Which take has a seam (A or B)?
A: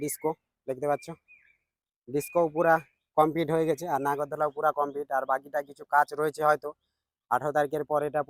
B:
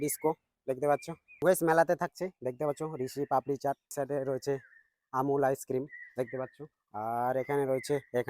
B